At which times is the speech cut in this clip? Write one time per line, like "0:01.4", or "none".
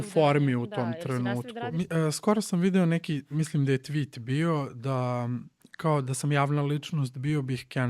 0:01.7